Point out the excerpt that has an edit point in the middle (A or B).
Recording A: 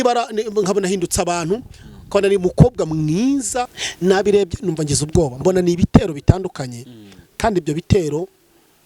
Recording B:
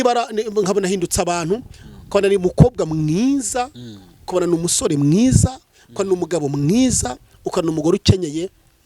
A